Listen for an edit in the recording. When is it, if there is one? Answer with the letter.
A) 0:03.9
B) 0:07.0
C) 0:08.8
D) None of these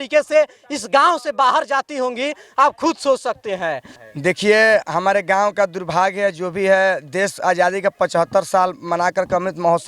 A